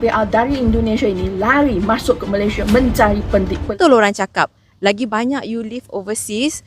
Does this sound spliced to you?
yes; 1 cut; at 3.7 s

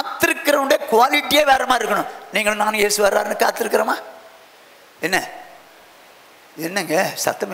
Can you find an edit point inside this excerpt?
no; 0 cuts

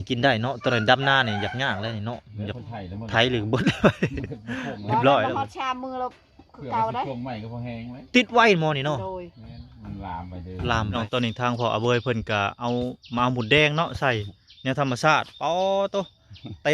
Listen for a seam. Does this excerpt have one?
yes; 1 cut; at 11.0 s

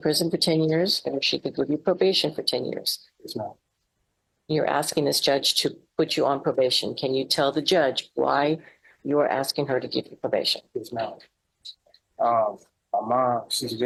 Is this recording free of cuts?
yes; 0 cuts

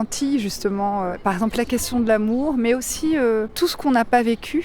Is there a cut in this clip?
yes; 2 cuts; at 1.2 s, 3.5 s

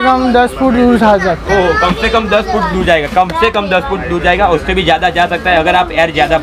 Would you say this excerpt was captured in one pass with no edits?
yes; 0 cuts

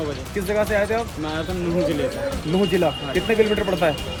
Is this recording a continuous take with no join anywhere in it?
yes; 0 cuts

